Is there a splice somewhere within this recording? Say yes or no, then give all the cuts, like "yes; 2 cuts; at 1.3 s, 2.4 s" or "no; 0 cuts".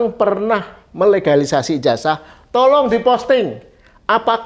no; 0 cuts